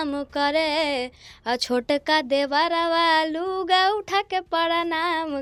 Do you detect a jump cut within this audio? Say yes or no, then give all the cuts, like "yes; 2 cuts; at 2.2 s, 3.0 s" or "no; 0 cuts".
no; 0 cuts